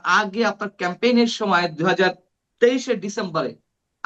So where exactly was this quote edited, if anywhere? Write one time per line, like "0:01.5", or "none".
none